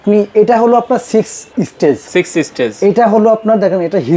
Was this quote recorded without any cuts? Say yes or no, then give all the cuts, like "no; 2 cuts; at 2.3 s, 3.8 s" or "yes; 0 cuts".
yes; 0 cuts